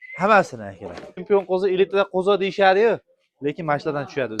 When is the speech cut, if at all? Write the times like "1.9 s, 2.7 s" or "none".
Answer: 1.2 s

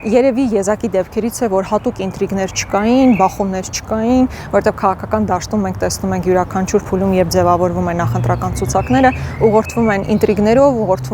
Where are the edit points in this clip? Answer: none

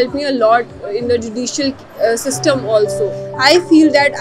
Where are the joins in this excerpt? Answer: 3.2 s

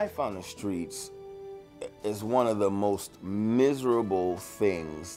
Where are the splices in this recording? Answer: none

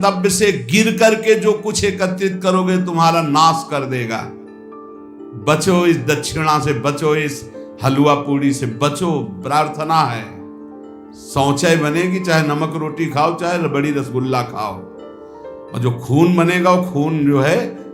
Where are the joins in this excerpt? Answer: none

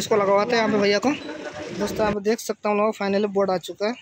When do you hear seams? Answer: 1.6 s

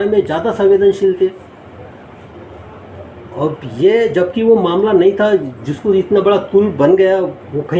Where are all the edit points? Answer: none

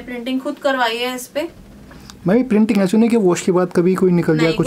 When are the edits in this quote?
none

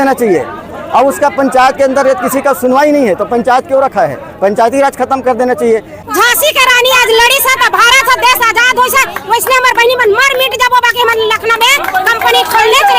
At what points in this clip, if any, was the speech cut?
6.0 s

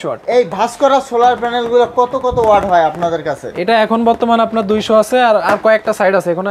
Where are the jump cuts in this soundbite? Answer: none

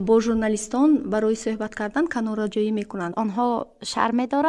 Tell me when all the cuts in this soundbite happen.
3.1 s

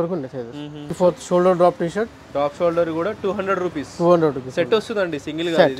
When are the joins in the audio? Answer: 1.0 s

